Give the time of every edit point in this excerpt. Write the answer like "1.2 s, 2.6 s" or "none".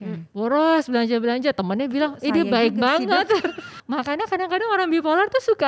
3.8 s